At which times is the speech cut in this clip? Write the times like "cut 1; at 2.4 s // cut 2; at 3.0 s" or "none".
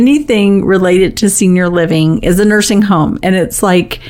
none